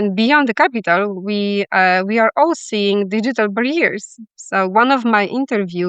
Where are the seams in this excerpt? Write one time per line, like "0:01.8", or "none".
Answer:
none